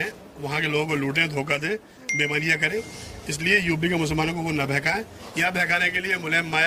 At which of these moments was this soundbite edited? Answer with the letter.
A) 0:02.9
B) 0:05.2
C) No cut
C